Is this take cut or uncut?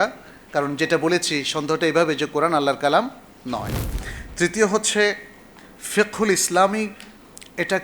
uncut